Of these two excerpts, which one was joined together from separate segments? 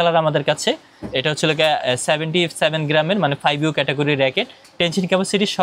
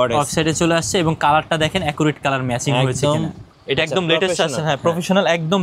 second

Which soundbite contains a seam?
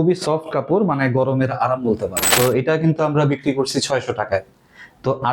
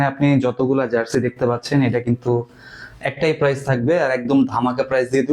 first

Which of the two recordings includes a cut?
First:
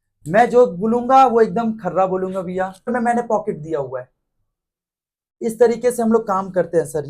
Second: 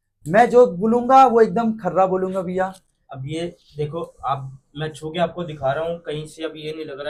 first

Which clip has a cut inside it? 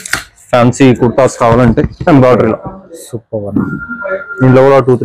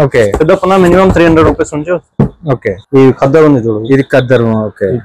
second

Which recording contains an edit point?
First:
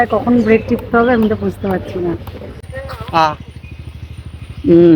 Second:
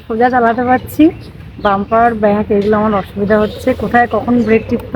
first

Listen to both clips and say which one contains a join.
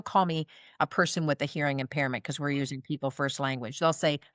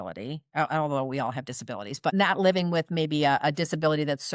second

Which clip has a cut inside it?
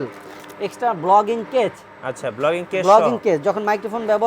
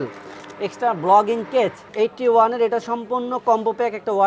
second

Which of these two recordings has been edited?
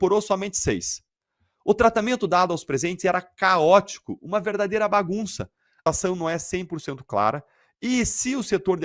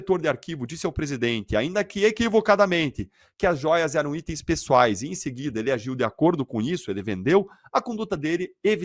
first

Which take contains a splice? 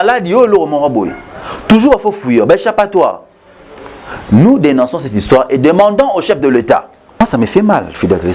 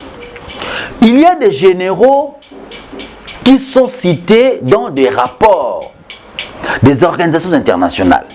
first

